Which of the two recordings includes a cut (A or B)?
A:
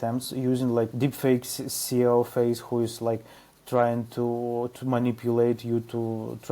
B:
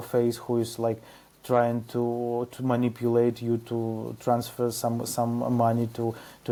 A